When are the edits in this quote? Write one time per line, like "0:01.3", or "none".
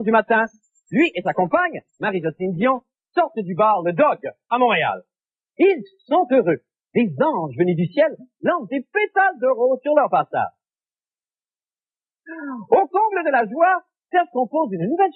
none